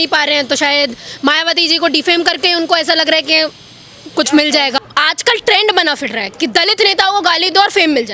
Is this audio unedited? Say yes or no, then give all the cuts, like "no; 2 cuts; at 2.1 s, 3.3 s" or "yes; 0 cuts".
no; 1 cut; at 4.8 s